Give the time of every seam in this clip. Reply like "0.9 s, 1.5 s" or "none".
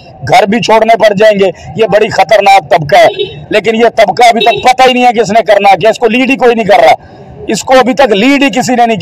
none